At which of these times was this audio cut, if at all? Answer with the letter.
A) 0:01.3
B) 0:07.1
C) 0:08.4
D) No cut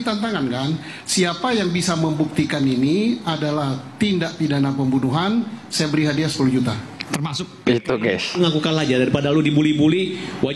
C